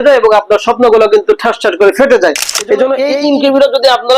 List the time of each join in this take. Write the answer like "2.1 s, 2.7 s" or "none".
3.1 s